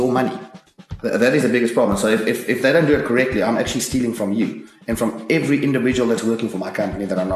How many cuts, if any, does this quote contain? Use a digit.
0